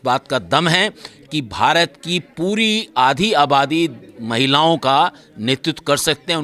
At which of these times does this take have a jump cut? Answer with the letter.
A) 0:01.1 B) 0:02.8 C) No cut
C